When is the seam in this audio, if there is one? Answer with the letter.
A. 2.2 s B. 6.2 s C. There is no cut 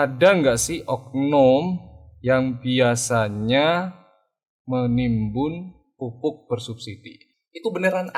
C